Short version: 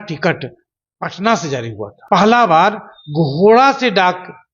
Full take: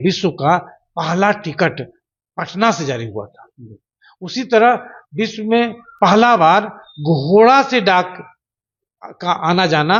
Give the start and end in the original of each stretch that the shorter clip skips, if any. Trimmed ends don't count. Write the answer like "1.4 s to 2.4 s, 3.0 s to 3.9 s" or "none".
3.3 s to 5.8 s